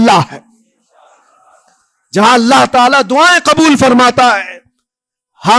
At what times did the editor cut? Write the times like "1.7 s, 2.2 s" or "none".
none